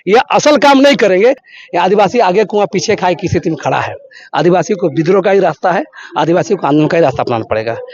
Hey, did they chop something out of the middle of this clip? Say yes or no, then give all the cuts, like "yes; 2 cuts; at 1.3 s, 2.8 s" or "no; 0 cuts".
yes; 1 cut; at 1.5 s